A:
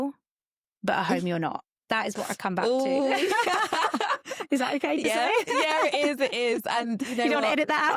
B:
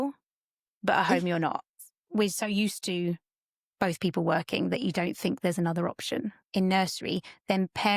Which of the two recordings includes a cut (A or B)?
B